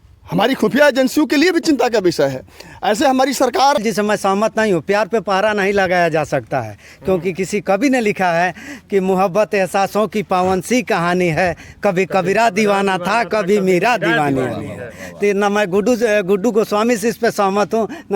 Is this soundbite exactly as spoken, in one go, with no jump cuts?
no; 1 cut; at 3.8 s

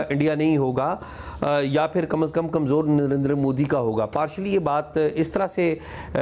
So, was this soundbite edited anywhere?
no; 0 cuts

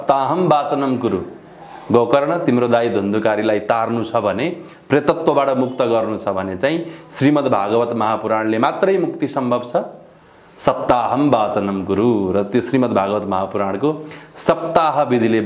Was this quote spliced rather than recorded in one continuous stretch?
no; 0 cuts

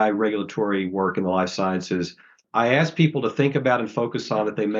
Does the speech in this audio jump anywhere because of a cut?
yes; 1 cut; at 2.4 s

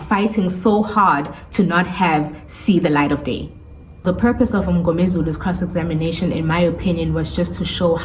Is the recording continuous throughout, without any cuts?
no; 1 cut; at 4.0 s

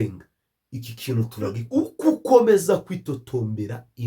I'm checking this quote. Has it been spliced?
yes; 1 cut; at 1.6 s

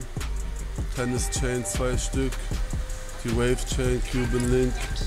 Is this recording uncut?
yes; 0 cuts

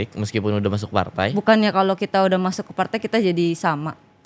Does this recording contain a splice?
no; 0 cuts

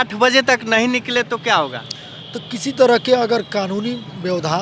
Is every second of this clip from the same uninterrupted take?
yes; 0 cuts

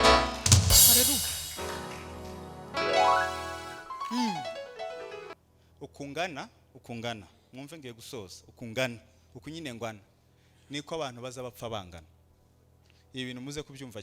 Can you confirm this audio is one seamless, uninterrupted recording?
no; 1 cut; at 5.3 s

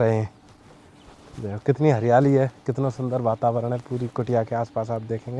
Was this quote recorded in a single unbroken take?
yes; 0 cuts

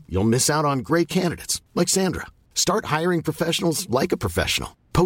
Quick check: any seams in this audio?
no; 0 cuts

